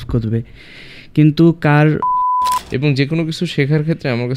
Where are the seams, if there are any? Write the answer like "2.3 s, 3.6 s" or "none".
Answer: 2.3 s

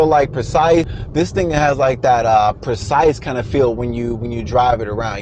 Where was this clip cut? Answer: 1.0 s

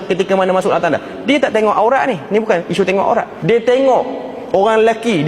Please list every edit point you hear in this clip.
3.3 s

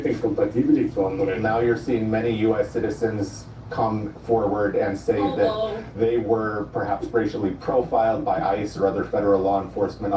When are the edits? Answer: 1.1 s

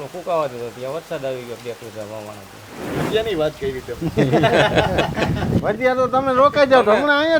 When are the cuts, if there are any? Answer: 2.9 s

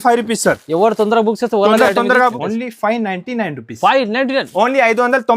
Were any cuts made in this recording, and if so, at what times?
2.4 s

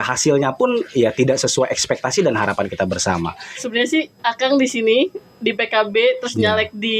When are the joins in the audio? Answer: 3.5 s

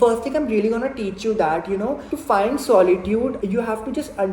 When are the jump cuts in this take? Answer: 2.1 s, 3.4 s

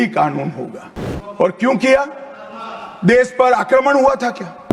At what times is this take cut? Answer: none

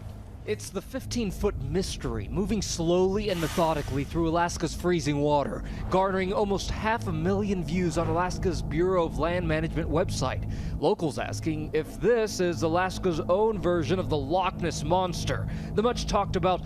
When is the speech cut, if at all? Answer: 6.1 s

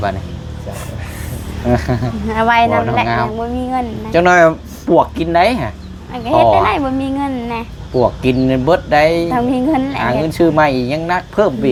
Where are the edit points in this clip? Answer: none

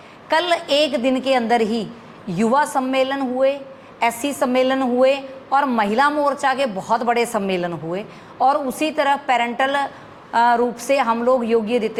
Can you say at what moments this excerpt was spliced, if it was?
none

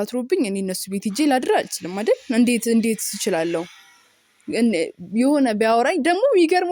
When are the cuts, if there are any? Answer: none

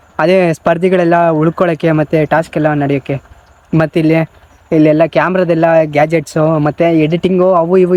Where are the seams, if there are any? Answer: none

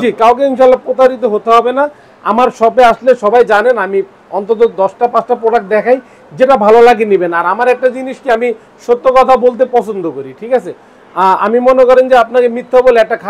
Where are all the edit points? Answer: none

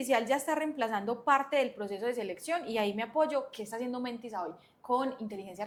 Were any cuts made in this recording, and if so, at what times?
none

